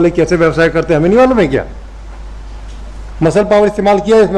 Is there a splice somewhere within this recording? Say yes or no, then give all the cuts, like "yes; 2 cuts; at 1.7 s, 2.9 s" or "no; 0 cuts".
no; 0 cuts